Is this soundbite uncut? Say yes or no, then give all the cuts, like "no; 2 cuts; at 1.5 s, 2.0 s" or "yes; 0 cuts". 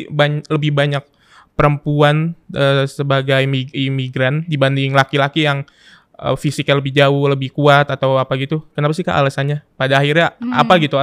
yes; 0 cuts